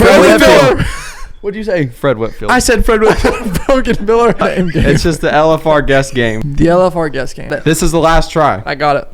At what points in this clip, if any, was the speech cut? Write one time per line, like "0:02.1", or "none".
0:04.4
0:06.4
0:07.5